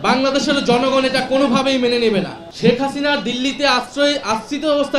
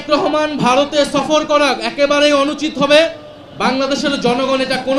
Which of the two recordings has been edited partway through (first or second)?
first